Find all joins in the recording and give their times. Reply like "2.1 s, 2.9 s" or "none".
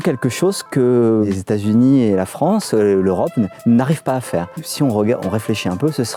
1.3 s, 4.6 s